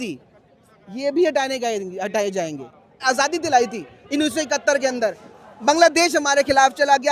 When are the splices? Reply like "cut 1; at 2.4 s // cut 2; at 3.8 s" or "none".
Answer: cut 1; at 3.0 s